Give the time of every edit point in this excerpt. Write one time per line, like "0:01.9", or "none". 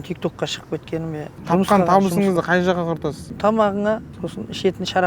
0:01.3
0:03.3
0:04.2